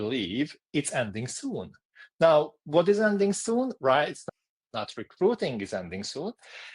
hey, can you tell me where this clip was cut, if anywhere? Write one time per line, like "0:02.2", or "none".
0:04.2